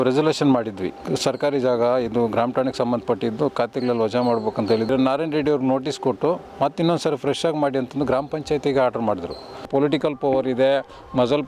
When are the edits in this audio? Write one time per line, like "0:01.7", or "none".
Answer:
0:01.1
0:04.9
0:09.7